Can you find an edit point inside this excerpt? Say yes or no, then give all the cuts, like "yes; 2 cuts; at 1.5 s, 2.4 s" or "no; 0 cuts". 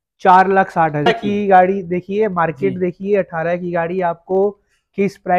yes; 1 cut; at 1.1 s